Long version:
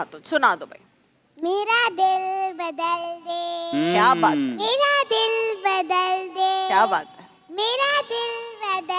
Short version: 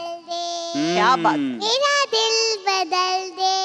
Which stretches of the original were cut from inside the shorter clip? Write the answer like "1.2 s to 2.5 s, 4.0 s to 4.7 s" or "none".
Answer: none